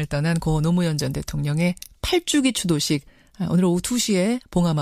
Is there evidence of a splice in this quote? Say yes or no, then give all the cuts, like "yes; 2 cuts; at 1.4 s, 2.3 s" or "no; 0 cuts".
yes; 1 cut; at 1.4 s